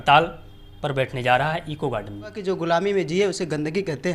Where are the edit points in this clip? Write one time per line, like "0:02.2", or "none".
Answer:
0:02.4